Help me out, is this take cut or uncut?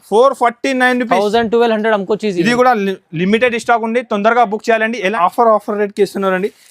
cut